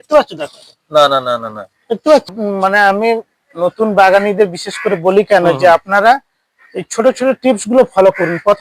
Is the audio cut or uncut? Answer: cut